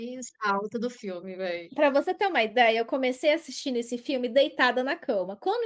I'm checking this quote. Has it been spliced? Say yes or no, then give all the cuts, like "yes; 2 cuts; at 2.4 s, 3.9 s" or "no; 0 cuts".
no; 0 cuts